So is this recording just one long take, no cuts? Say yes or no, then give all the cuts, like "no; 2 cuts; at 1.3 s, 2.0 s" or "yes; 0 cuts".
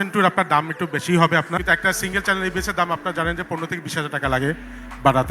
no; 1 cut; at 1.6 s